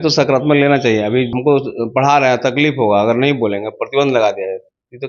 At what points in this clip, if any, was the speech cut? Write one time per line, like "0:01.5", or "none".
0:01.3